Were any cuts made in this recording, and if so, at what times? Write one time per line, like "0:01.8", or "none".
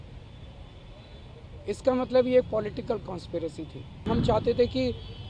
0:04.1